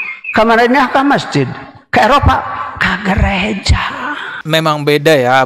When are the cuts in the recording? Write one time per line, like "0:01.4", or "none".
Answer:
0:04.4